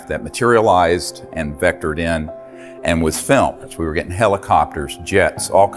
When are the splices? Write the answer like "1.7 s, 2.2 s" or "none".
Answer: 3.6 s

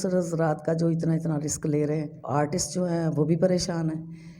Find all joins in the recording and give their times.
2.2 s

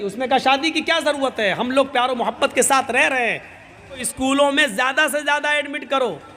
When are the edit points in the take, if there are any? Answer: 4.1 s

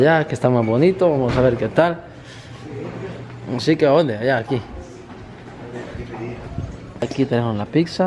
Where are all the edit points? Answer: 7.0 s

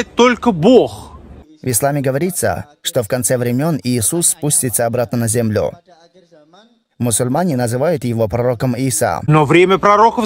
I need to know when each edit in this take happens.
none

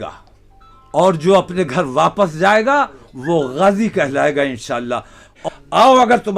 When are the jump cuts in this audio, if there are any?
5.4 s

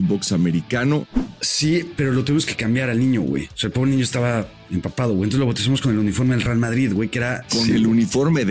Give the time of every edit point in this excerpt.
1.2 s, 7.4 s

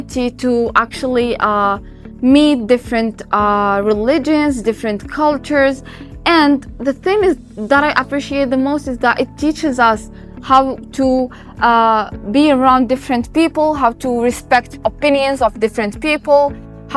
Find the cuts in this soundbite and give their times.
none

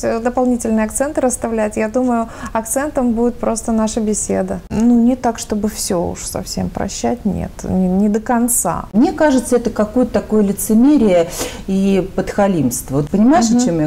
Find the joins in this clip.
4.7 s, 8.9 s, 13.0 s

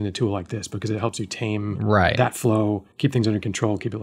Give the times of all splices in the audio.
1.9 s, 2.9 s

